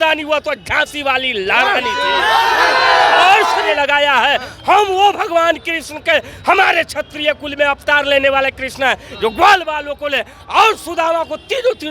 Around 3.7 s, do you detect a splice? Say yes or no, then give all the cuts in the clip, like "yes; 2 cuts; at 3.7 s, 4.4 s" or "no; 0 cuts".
yes; 1 cut; at 3.7 s